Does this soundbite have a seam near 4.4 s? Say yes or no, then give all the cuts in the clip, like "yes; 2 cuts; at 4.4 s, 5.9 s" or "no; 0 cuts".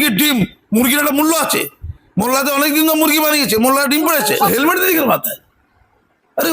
yes; 1 cut; at 4.4 s